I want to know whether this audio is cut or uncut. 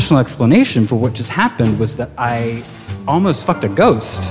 uncut